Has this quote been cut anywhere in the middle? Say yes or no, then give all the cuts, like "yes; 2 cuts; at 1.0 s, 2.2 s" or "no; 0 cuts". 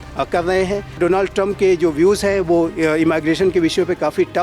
yes; 1 cut; at 1.0 s